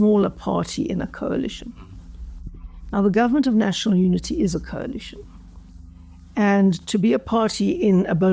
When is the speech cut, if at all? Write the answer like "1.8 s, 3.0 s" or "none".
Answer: none